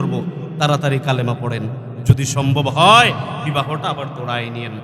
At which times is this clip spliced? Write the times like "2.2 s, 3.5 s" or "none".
none